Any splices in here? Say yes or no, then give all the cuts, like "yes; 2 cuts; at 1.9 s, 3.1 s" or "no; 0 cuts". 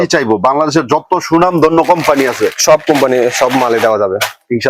no; 0 cuts